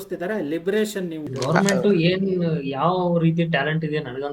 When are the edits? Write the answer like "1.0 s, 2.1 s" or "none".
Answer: 1.2 s